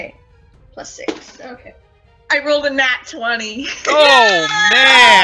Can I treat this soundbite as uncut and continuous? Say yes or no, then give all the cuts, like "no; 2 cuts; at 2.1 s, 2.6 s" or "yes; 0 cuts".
no; 1 cut; at 1.4 s